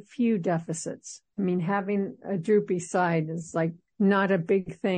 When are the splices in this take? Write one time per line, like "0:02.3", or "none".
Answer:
0:03.8